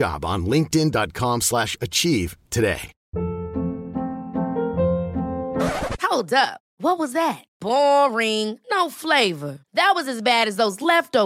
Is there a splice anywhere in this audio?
yes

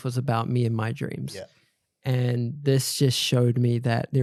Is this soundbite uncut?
yes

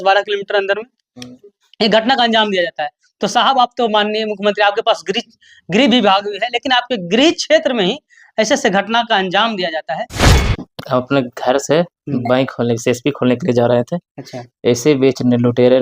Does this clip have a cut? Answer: yes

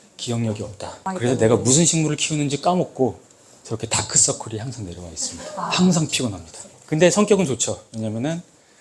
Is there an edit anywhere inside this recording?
yes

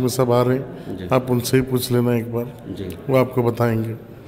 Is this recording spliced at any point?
no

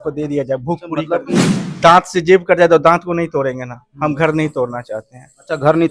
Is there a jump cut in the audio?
yes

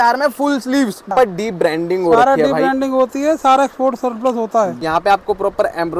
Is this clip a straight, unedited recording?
no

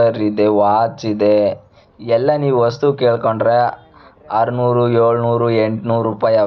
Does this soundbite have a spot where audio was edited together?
no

